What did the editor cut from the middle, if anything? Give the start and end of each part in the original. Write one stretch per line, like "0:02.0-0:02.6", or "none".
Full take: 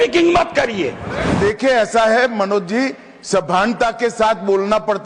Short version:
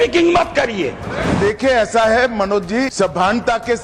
0:02.9-0:03.2